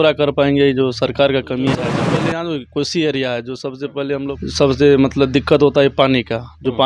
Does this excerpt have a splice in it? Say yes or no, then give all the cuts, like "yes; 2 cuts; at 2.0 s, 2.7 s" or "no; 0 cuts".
yes; 2 cuts; at 2.0 s, 4.4 s